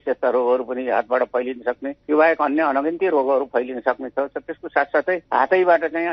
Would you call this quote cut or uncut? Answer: uncut